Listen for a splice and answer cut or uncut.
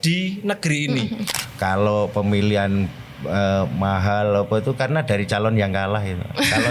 cut